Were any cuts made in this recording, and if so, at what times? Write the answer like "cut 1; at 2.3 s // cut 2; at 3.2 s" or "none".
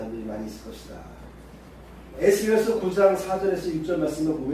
cut 1; at 1.7 s